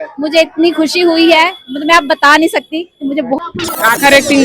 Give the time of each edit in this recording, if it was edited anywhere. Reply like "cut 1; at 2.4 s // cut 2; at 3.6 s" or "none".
cut 1; at 3.4 s